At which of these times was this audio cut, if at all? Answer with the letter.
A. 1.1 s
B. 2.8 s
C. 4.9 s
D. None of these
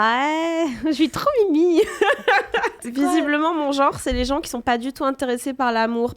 B